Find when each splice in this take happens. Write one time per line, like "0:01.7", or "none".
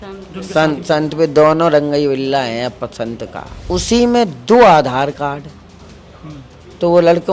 0:03.5